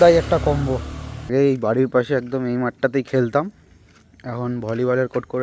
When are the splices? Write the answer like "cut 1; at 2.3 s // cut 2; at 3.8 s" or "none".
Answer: cut 1; at 1.3 s